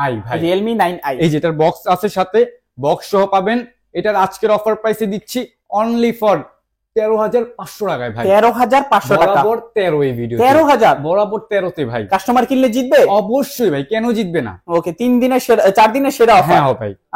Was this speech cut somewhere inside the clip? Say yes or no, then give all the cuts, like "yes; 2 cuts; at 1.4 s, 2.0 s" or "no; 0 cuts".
no; 0 cuts